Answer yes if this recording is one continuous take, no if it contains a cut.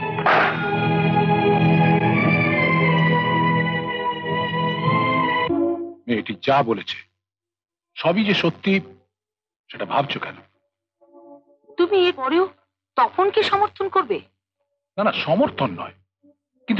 yes